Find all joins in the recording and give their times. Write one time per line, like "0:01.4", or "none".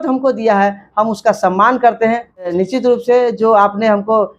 0:02.5